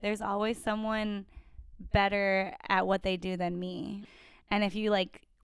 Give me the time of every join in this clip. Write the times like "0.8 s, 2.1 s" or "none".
4.0 s